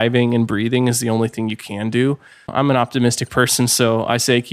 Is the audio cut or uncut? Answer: cut